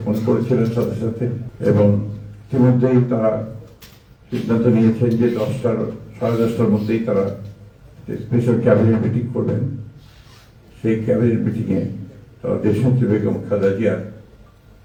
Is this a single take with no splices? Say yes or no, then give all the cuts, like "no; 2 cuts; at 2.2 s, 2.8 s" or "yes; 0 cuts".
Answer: yes; 0 cuts